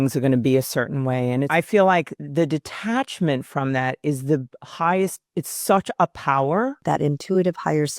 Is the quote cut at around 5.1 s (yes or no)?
no